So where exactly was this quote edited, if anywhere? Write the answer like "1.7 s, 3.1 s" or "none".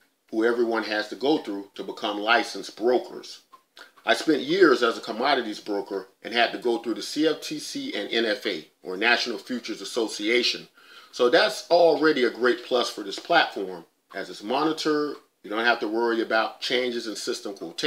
4.7 s